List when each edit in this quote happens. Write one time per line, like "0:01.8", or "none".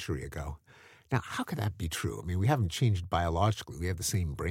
none

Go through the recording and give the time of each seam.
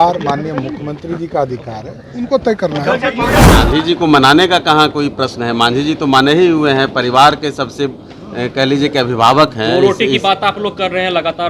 0:03.4

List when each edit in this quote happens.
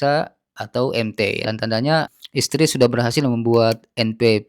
0:01.4

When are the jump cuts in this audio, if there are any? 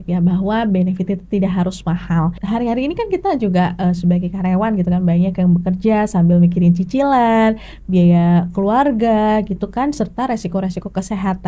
0:02.4

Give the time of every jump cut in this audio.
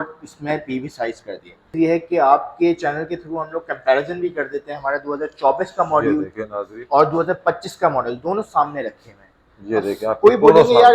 0:01.7

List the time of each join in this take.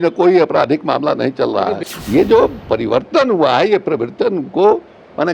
0:01.9

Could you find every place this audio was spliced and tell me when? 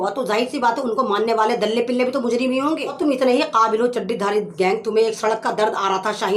0:02.9

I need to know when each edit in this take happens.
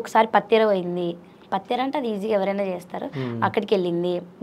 none

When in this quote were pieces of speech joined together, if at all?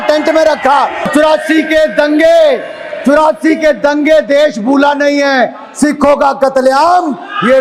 0:01.1

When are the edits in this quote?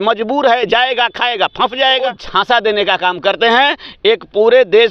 0:02.2

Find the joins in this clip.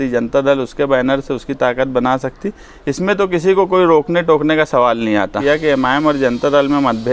0:05.4

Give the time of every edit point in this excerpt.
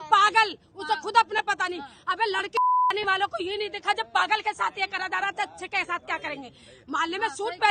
none

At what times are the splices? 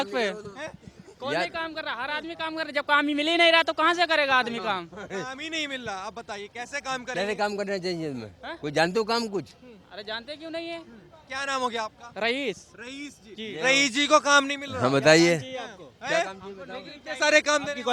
none

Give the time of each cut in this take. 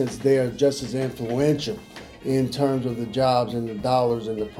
none

